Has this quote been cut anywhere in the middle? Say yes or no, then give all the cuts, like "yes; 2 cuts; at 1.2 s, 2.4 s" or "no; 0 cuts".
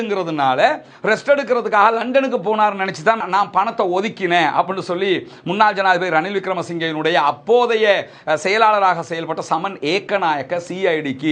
no; 0 cuts